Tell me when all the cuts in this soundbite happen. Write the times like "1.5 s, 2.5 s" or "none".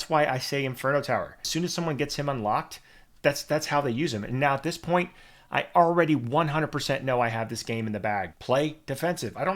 1.5 s, 8.3 s